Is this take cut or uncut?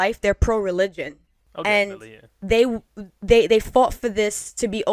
uncut